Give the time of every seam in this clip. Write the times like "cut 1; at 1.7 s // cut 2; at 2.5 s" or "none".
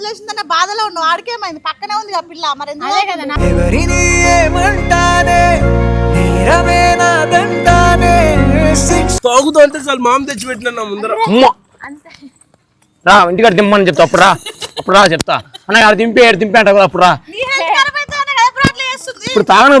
cut 1; at 9.2 s